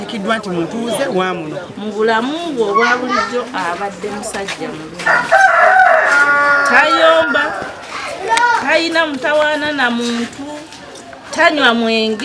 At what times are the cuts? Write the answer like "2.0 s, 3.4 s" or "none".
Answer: 1.7 s